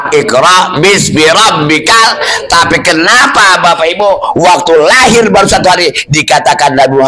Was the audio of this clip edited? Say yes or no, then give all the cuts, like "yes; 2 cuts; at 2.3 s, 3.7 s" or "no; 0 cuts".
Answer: no; 0 cuts